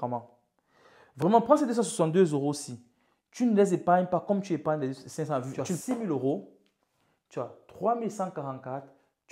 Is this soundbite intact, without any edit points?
no; 1 cut; at 5.7 s

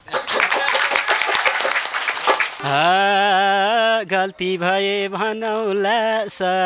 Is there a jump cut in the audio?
yes; 1 cut; at 2.6 s

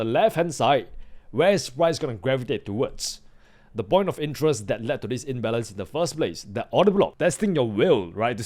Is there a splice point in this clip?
yes; 1 cut; at 7.1 s

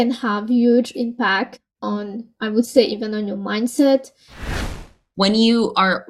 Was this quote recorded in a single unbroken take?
no; 1 cut; at 4.6 s

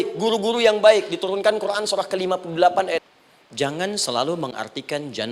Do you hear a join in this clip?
yes; 1 cut; at 3.1 s

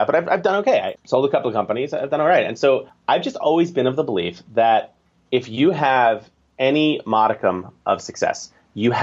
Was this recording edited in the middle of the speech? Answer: yes; 2 cuts; at 1.0 s, 2.9 s

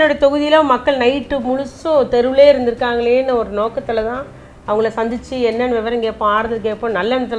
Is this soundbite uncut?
yes; 0 cuts

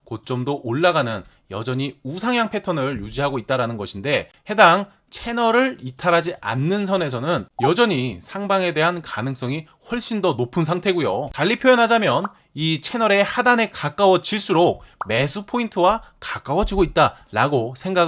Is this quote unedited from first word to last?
yes; 0 cuts

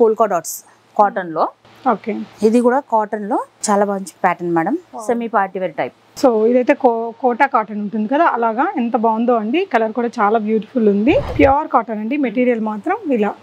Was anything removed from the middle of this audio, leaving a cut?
yes; 1 cut; at 11.4 s

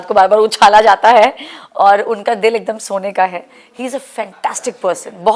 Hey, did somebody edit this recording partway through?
no; 0 cuts

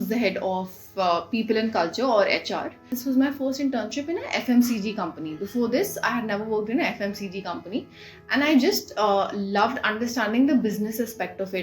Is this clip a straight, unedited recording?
no; 1 cut; at 2.9 s

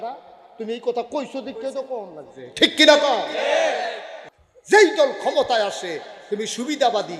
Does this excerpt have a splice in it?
yes; 1 cut; at 4.2 s

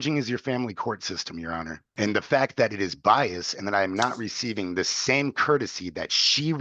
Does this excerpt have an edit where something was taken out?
yes; 1 cut; at 1.8 s

